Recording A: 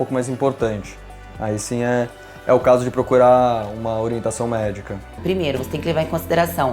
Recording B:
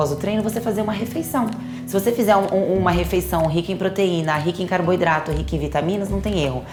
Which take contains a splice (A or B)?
A